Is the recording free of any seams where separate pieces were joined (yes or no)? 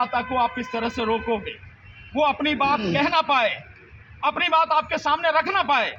yes